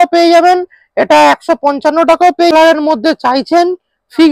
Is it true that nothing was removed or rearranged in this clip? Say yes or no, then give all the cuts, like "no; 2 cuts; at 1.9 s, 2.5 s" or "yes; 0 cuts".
no; 1 cut; at 2.5 s